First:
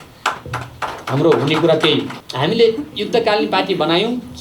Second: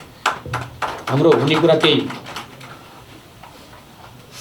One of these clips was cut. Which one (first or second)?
first